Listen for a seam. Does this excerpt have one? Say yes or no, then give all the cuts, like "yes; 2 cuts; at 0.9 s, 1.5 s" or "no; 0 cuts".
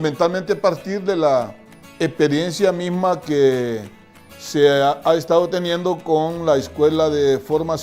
yes; 1 cut; at 2.5 s